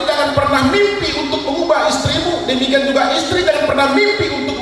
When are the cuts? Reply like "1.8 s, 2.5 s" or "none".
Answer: none